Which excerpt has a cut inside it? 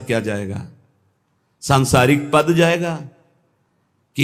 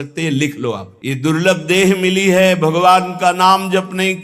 second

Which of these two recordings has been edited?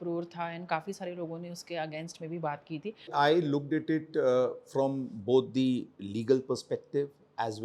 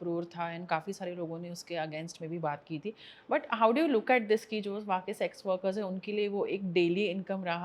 first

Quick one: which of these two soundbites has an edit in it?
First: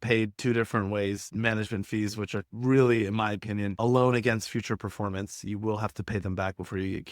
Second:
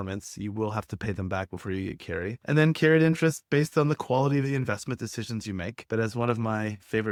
first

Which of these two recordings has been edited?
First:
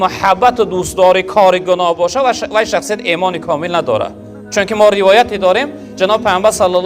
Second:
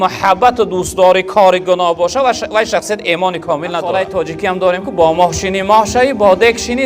second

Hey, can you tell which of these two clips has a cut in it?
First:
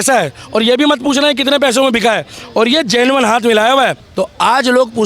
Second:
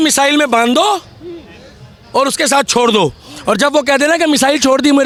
first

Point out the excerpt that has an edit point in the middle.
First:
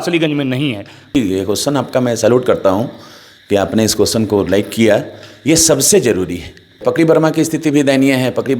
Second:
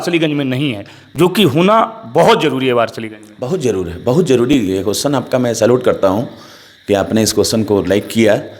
first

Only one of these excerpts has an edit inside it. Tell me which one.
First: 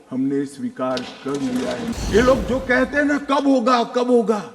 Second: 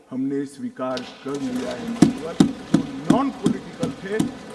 first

